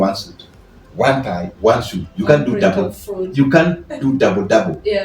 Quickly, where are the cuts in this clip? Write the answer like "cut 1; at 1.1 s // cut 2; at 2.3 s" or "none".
none

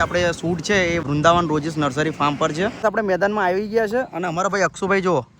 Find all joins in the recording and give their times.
cut 1; at 1.0 s // cut 2; at 2.8 s

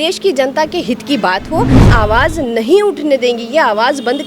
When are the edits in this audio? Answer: cut 1; at 1.9 s

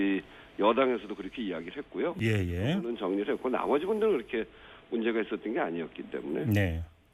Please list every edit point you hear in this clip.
none

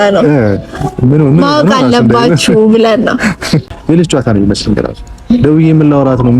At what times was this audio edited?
cut 1; at 3.7 s

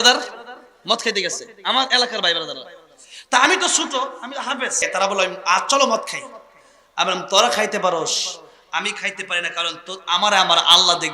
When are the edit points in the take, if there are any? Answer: cut 1; at 4.9 s

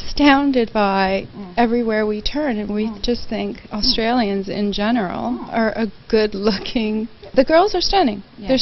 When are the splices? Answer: cut 1; at 5.0 s

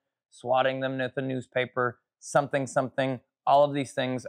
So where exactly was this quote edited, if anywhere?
none

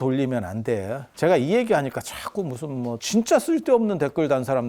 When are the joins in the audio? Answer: cut 1; at 1.0 s // cut 2; at 3.0 s

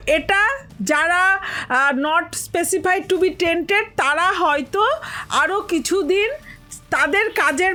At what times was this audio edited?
none

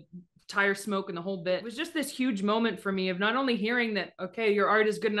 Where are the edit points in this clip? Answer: cut 1; at 1.8 s

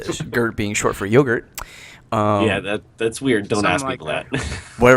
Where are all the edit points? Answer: cut 1; at 2.6 s

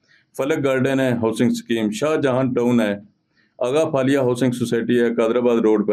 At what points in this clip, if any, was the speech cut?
none

